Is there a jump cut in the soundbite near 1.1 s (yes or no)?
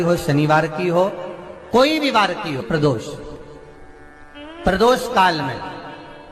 no